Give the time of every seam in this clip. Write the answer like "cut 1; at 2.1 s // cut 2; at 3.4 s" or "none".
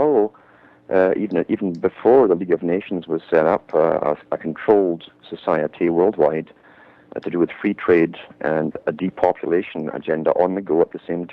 cut 1; at 9.0 s